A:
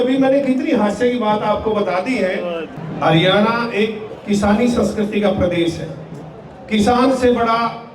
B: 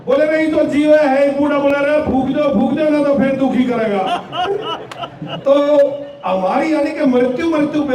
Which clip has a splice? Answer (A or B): A